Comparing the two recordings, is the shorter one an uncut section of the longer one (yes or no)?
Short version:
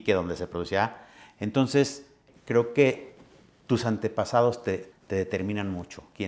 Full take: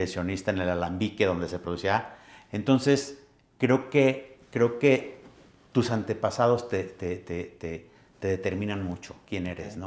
no